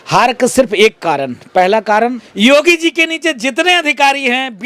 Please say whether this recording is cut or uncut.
cut